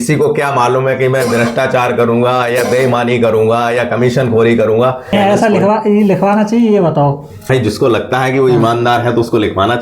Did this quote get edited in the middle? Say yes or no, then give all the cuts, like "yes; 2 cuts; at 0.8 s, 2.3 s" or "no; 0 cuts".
yes; 2 cuts; at 5.1 s, 7.5 s